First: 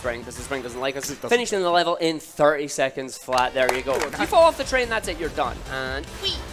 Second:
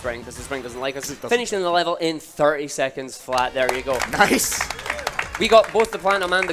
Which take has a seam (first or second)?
first